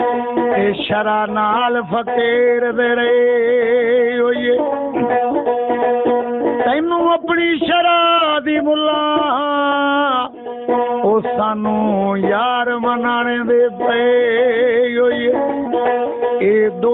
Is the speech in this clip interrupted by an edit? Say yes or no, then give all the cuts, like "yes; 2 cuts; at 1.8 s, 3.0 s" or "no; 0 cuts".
no; 0 cuts